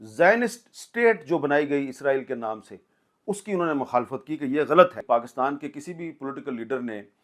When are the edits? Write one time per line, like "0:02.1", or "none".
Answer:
0:05.0